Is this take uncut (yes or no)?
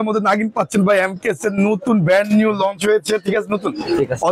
yes